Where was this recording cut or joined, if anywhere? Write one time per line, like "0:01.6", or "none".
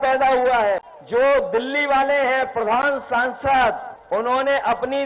0:00.9
0:03.9